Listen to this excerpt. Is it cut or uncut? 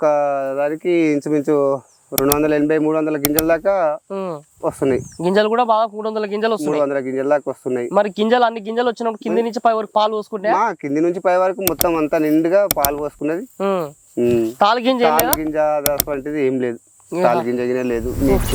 uncut